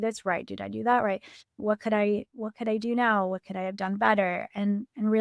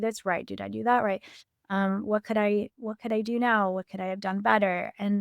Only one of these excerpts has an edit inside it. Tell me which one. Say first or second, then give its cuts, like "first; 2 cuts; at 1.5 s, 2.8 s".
first; 1 cut; at 1.6 s